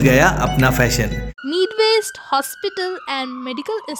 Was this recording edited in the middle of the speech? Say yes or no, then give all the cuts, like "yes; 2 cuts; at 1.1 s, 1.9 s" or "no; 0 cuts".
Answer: yes; 1 cut; at 1.3 s